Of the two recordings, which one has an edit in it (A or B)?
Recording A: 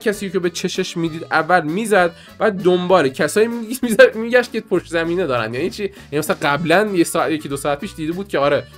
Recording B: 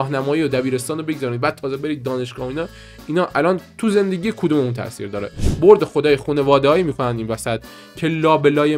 B